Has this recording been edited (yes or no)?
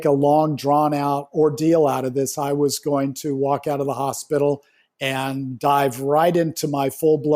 yes